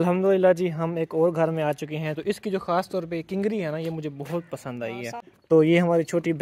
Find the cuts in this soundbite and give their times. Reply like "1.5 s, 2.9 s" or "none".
5.3 s